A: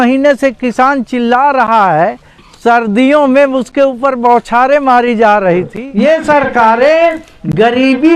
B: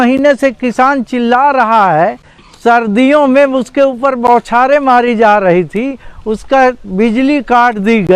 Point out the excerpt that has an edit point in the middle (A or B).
A